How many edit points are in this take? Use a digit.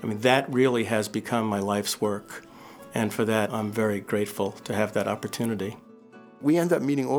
2